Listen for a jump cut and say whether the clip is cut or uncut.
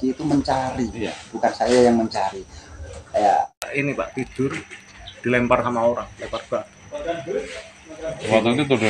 cut